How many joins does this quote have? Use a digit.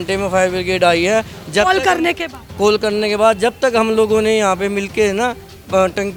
0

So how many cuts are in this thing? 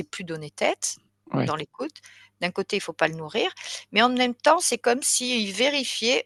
0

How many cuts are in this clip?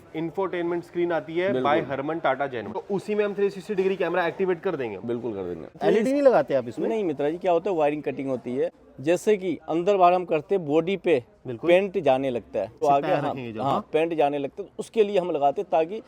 4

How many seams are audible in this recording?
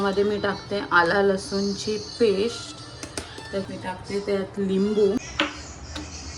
1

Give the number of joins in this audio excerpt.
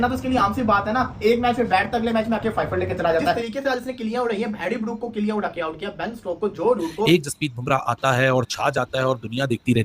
2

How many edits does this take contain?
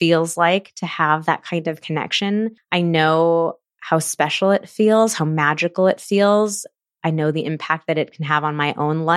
1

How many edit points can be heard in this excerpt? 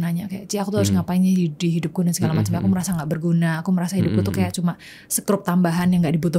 0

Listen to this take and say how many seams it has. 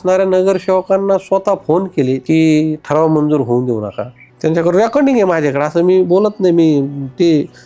2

